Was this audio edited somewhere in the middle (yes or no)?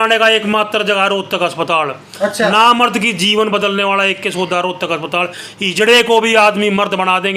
no